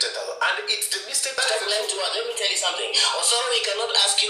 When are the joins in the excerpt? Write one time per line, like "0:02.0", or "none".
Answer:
0:01.4